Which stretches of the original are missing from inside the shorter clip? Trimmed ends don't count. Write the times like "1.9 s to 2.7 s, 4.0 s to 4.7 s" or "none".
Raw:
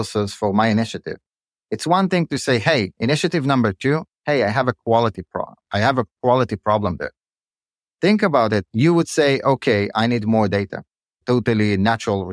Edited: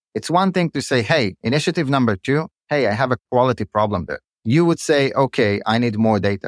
4.8 s to 6.1 s, 7.3 s to 8.7 s